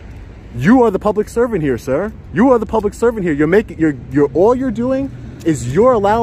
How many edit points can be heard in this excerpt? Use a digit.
0